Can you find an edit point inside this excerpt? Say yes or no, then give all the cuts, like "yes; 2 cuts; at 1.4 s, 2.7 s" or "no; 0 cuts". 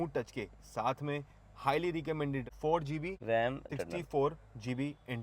yes; 2 cuts; at 2.4 s, 3.6 s